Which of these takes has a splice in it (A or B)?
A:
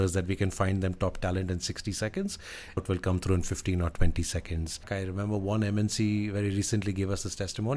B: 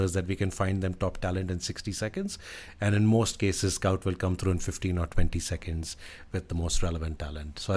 A